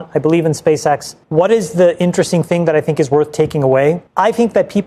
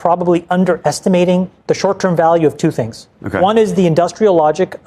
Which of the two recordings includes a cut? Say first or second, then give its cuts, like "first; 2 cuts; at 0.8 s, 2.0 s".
first; 2 cuts; at 1.2 s, 4.1 s